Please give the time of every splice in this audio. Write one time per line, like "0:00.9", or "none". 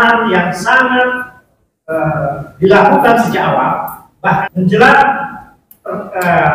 0:04.5